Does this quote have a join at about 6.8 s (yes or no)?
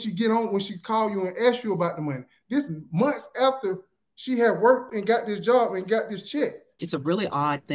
yes